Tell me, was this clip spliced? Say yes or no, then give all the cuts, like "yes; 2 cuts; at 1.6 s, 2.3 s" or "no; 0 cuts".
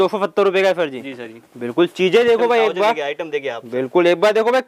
no; 0 cuts